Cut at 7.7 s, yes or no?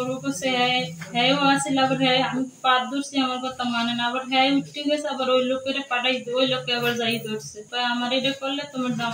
yes